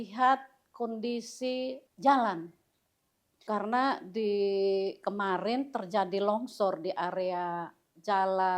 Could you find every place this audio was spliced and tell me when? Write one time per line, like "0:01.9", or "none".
0:01.8
0:03.4

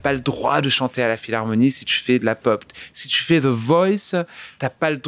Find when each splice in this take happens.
none

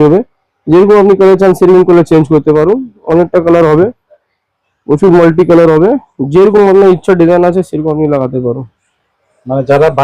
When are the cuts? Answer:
none

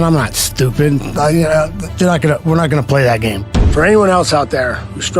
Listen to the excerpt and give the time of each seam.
0:03.4

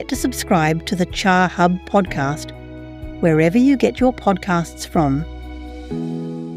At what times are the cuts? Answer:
0:05.3

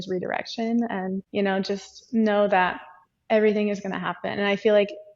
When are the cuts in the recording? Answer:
0:01.2

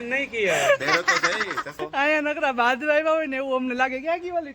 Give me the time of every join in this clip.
0:01.8

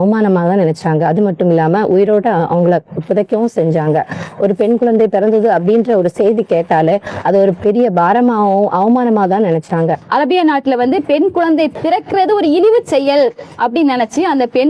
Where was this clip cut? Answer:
0:10.0
0:11.7

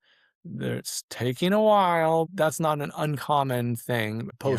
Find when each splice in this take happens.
0:02.3

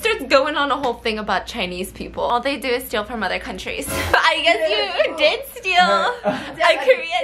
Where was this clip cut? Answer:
0:02.3
0:04.1

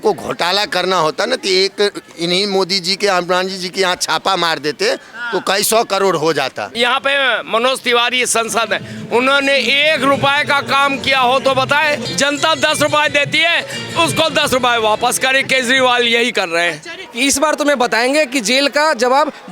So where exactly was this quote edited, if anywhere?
0:06.7
0:12.1
0:17.1

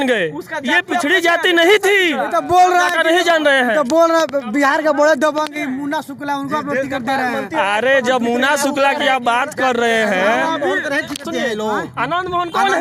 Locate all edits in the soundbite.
none

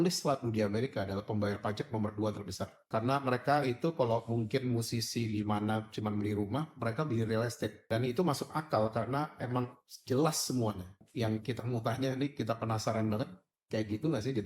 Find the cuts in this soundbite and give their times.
0:02.7
0:07.8
0:11.0

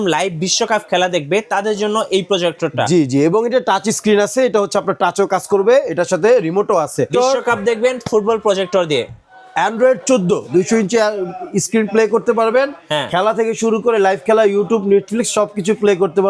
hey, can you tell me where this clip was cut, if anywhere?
0:07.1
0:10.4

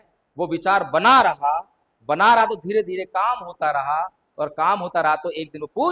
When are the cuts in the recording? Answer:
none

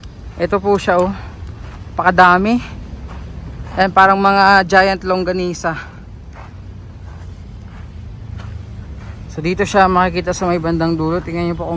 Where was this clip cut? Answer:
none

